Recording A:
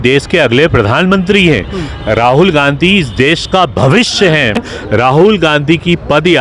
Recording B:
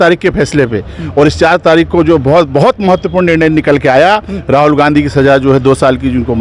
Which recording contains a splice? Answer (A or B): A